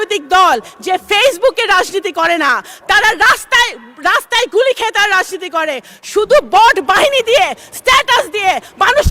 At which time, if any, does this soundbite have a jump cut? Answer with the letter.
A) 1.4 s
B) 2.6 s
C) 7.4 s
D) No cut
D